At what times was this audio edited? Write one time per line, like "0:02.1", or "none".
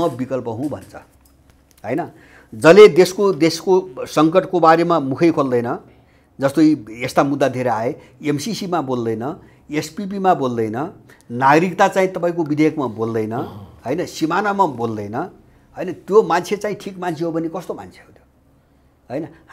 none